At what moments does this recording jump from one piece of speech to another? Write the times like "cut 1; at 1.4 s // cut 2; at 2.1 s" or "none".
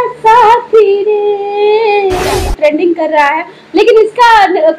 cut 1; at 2.4 s